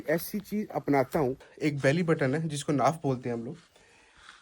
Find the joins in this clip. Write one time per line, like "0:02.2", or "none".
0:01.5